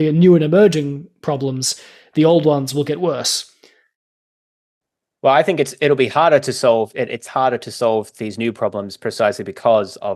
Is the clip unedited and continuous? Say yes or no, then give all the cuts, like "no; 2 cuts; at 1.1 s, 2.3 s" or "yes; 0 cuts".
yes; 0 cuts